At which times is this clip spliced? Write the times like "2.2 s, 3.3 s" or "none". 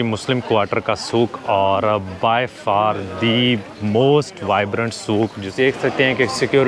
5.4 s